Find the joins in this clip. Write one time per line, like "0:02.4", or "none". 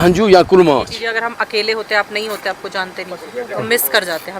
0:01.0